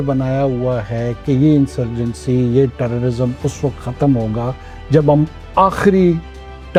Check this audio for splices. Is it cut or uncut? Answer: uncut